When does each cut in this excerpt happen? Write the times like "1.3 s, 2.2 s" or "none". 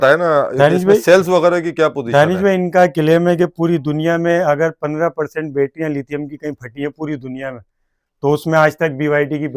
none